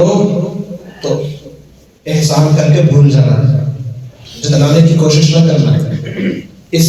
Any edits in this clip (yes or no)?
no